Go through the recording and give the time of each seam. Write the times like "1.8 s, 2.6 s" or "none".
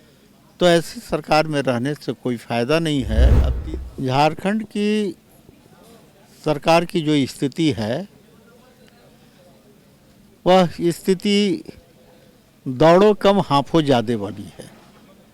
3.5 s